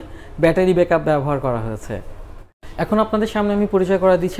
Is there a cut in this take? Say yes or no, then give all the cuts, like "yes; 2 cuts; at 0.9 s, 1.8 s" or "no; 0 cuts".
yes; 1 cut; at 2.7 s